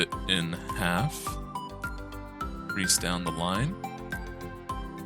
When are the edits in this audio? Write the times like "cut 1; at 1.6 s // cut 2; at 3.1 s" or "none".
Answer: cut 1; at 3.8 s